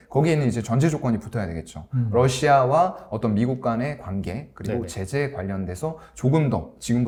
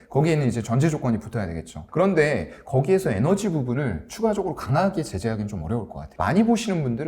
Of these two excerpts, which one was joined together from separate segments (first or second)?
second